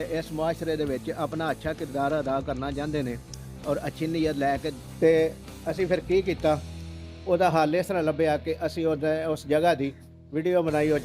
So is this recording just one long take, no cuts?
no; 1 cut; at 4.8 s

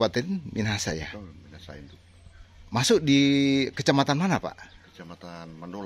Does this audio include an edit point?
no; 0 cuts

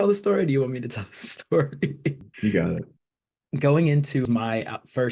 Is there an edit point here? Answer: yes; 3 cuts; at 2.3 s, 3.2 s, 4.3 s

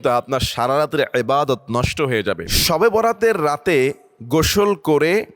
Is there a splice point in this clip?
yes; 1 cut; at 2.5 s

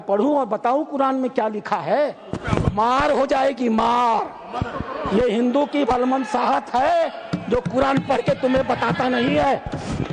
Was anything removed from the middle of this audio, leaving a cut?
no; 0 cuts

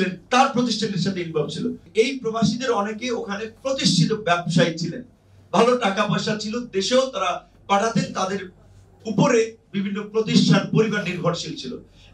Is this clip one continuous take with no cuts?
no; 1 cut; at 1.9 s

